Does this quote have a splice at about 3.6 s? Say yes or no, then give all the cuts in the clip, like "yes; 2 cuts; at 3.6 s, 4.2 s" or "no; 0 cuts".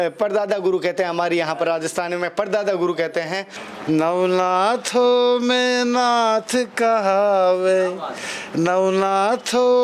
yes; 1 cut; at 3.6 s